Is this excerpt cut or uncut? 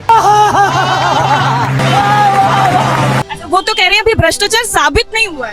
cut